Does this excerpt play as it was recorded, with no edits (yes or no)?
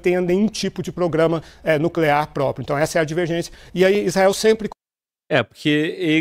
yes